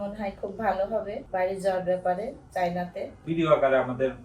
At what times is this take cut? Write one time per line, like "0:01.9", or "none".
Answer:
0:01.2
0:03.1